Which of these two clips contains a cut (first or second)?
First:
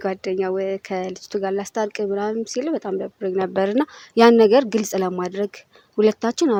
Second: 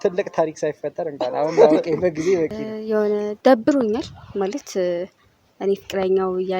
second